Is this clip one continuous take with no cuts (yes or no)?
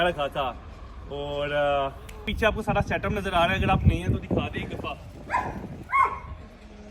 no